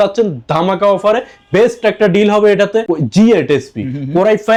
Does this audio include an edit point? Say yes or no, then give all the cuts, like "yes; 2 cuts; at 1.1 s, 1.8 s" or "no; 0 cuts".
no; 0 cuts